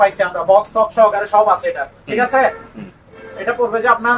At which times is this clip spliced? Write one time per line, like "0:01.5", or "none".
none